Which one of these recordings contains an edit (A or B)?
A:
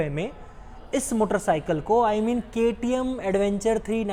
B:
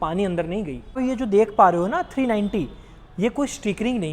B